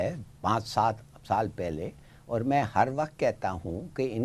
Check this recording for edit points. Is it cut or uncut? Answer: uncut